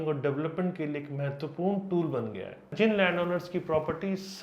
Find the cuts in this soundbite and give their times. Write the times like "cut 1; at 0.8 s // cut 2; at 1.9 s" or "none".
cut 1; at 2.7 s